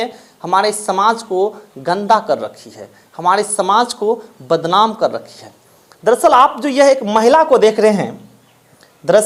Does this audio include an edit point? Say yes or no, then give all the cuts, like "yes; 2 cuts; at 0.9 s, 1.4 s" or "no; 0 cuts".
no; 0 cuts